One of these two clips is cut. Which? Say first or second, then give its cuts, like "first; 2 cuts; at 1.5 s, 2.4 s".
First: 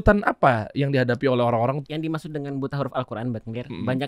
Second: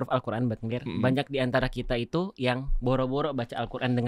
first; 1 cut; at 1.8 s